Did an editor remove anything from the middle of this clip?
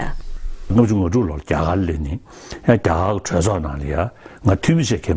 yes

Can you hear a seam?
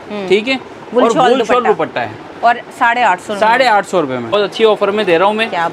yes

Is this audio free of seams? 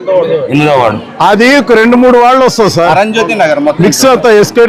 yes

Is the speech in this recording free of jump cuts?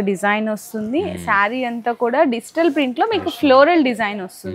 yes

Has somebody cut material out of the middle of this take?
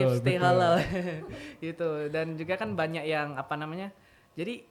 no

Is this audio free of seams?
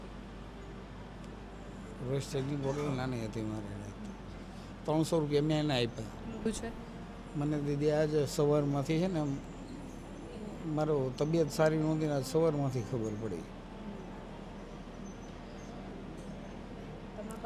no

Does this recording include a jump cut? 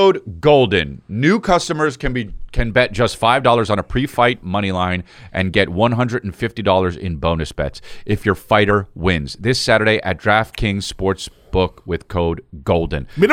no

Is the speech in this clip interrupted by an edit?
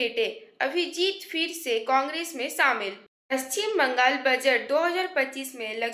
yes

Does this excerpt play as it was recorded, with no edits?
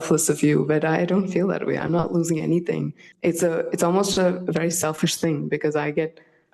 no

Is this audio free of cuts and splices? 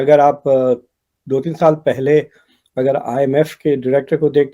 yes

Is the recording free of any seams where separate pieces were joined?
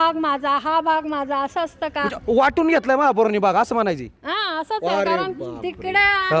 yes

